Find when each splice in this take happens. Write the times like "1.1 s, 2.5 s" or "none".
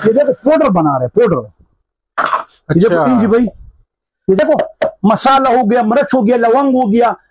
4.4 s